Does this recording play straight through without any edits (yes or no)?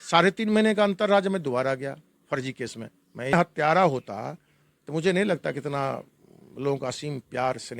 no